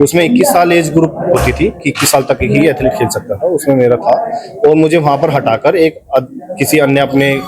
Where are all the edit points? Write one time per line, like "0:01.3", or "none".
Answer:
none